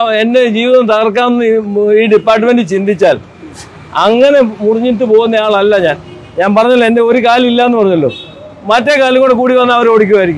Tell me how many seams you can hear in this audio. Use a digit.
0